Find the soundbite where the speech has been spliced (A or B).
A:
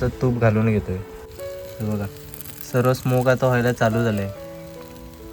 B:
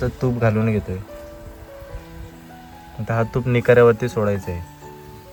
A